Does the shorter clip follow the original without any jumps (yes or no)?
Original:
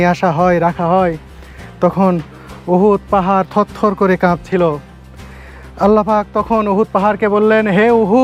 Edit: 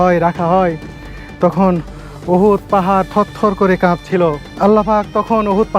no